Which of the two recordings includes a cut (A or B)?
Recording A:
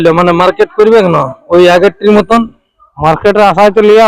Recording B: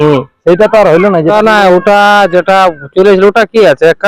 B